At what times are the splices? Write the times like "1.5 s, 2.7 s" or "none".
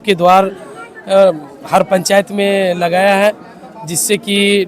none